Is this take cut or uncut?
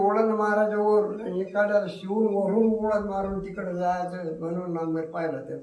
uncut